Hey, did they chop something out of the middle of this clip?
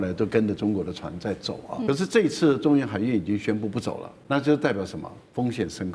yes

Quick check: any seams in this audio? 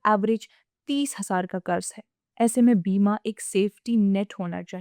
no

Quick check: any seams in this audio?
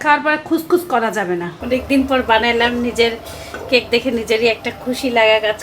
yes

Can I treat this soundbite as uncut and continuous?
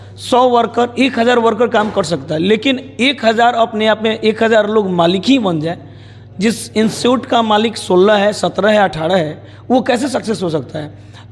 yes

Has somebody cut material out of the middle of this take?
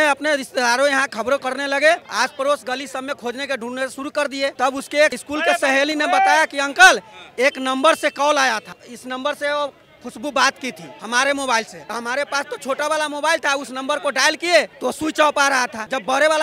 no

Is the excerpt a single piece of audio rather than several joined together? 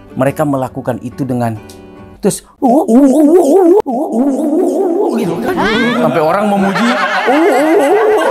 yes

